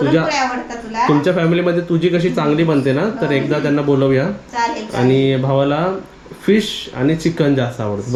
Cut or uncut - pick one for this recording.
uncut